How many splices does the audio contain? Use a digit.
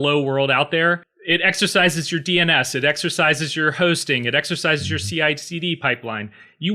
1